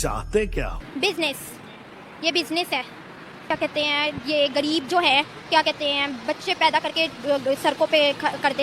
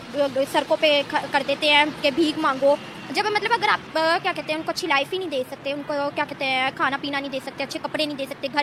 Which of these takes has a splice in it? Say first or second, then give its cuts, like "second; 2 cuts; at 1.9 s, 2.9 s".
first; 1 cut; at 3.5 s